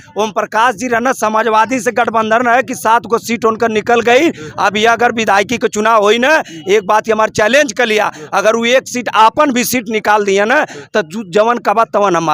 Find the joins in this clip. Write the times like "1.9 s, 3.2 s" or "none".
none